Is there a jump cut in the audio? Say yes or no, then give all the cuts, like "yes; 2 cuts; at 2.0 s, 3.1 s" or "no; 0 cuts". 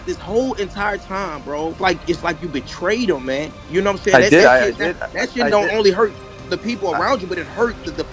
no; 0 cuts